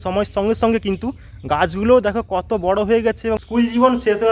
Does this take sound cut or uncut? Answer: cut